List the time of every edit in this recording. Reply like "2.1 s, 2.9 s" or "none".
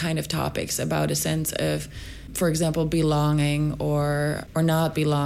2.3 s, 4.4 s